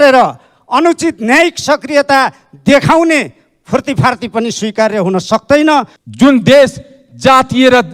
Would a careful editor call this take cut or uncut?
cut